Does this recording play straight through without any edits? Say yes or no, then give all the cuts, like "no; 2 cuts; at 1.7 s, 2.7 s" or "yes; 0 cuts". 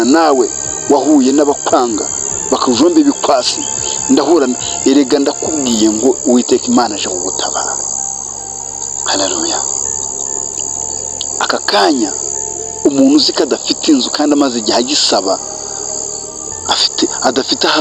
yes; 0 cuts